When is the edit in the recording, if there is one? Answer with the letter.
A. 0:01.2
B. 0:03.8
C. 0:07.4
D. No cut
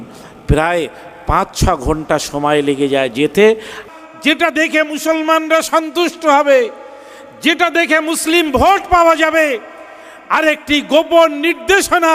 B